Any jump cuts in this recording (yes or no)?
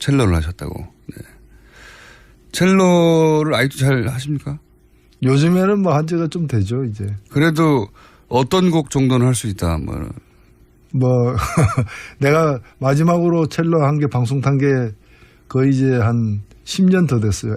yes